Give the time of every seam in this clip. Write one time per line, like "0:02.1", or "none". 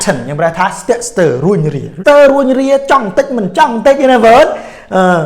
0:01.9